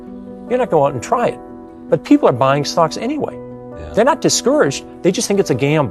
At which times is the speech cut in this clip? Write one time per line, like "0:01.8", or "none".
none